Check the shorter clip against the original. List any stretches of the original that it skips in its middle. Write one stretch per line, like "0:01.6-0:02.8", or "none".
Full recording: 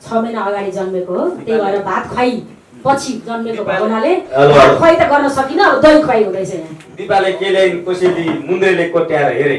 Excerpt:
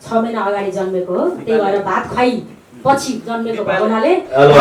none